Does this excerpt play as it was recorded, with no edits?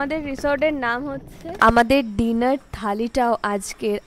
no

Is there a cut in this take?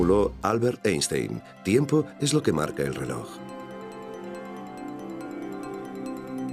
yes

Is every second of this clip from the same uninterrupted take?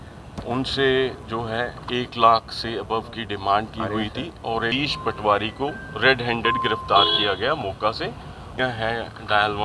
no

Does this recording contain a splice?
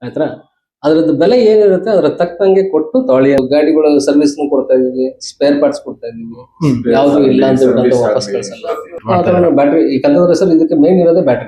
yes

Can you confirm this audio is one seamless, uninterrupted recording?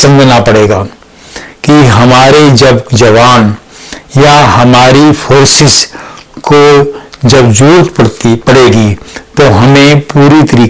yes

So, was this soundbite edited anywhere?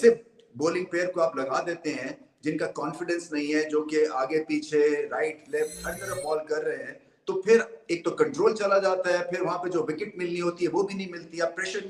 no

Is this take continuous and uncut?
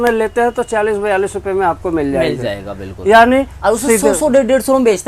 yes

